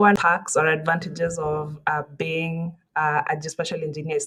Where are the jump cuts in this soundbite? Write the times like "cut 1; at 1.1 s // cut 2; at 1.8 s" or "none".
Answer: none